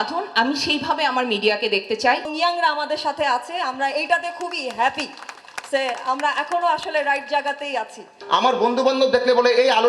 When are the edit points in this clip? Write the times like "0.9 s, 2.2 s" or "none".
2.3 s, 8.1 s